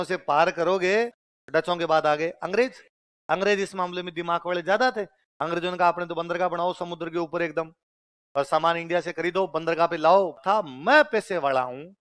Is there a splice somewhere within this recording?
yes; 2 cuts; at 1.2 s, 10.4 s

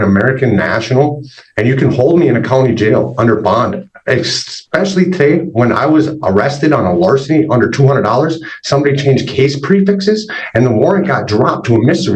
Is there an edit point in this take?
no; 0 cuts

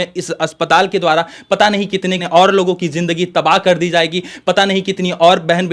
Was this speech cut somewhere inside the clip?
yes; 1 cut; at 2.3 s

